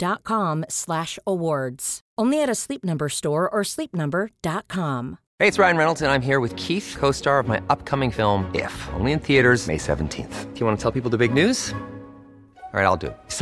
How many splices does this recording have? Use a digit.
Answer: 1